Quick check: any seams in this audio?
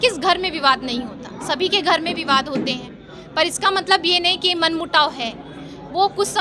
no; 0 cuts

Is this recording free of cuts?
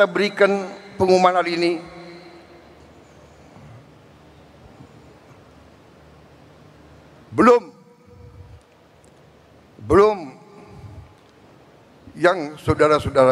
yes; 0 cuts

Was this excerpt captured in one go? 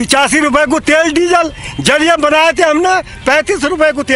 yes; 0 cuts

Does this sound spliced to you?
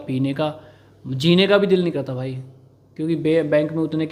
no; 0 cuts

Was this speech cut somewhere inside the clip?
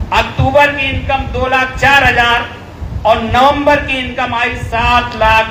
no; 0 cuts

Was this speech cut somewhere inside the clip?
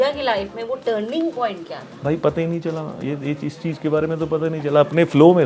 no; 0 cuts

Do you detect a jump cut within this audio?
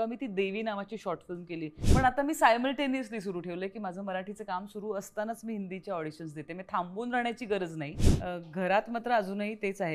yes; 2 cuts; at 1.8 s, 8.0 s

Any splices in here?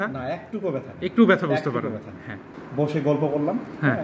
yes; 1 cut; at 2.5 s

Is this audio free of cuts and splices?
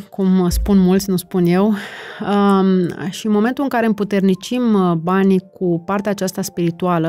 yes; 0 cuts

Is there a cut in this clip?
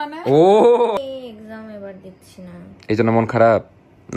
yes; 1 cut; at 1.0 s

